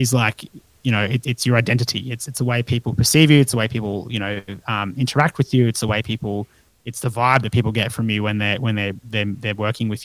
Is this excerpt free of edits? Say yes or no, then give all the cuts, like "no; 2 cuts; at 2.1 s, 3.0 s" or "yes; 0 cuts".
no; 1 cut; at 1.2 s